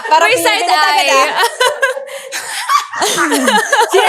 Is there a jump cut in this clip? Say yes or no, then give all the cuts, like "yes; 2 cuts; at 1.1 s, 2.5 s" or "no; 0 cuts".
no; 0 cuts